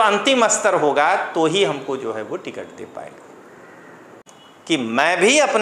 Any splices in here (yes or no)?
yes